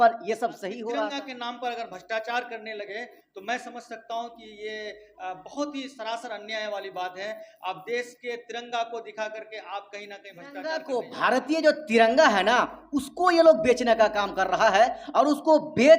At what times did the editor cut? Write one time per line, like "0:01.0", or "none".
0:01.2
0:10.6